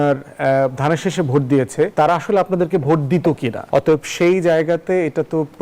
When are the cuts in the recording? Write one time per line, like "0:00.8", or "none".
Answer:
0:01.9
0:03.5